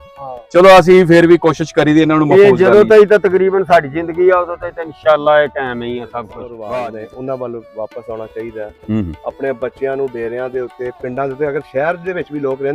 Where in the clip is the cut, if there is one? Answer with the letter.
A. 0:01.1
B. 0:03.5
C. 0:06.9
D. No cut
C